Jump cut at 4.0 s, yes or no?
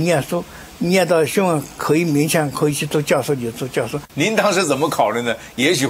yes